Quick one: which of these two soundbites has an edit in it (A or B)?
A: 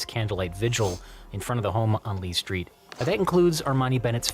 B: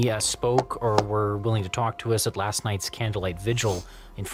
A